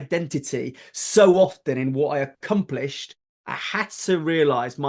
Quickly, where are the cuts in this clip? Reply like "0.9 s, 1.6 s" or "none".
3.3 s